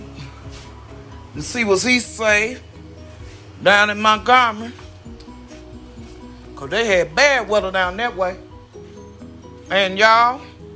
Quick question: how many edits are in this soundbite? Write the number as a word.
four